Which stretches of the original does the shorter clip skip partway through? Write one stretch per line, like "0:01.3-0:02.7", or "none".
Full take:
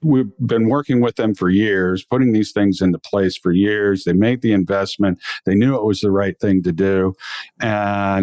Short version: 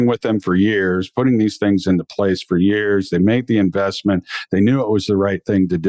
none